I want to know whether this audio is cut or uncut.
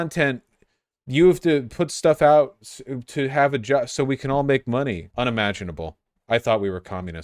cut